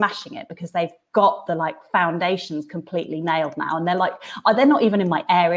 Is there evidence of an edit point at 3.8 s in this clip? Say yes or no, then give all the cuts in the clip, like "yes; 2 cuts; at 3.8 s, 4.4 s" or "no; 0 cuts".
no; 0 cuts